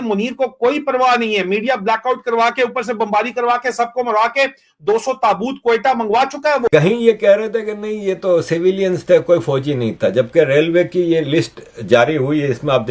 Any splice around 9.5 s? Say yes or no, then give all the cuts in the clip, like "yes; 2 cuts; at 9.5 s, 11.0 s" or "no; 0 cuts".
no; 1 cut; at 6.7 s